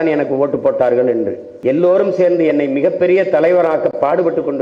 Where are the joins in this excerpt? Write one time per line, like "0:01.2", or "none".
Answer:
0:01.5